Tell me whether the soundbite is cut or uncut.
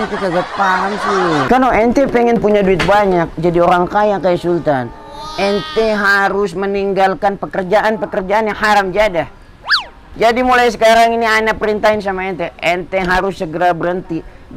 cut